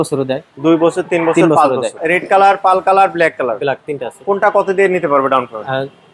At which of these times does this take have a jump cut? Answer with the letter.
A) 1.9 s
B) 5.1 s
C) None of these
A